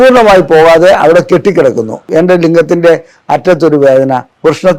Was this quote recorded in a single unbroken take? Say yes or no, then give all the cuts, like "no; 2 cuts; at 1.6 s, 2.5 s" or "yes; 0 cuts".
no; 1 cut; at 2.0 s